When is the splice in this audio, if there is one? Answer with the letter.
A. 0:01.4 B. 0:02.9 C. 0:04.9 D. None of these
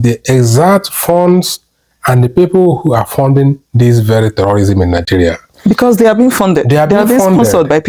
D